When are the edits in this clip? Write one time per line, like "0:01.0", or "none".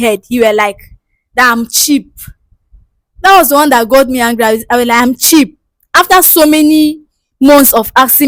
none